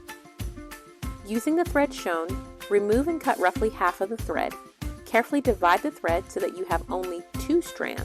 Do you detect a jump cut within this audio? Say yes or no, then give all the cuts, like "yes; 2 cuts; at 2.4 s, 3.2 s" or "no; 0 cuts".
yes; 1 cut; at 1.2 s